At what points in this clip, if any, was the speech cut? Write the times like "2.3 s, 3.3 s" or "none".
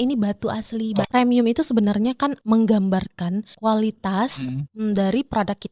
1.1 s, 2.4 s, 3.5 s, 4.6 s